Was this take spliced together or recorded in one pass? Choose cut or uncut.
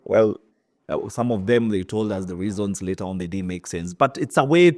uncut